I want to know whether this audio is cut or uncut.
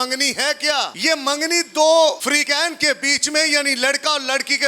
cut